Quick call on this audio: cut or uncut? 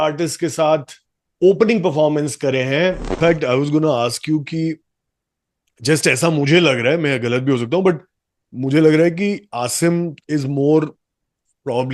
cut